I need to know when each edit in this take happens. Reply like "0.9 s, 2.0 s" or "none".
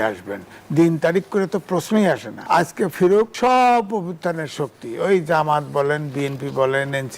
2.3 s, 3.3 s